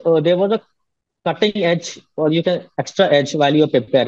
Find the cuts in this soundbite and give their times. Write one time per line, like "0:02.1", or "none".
none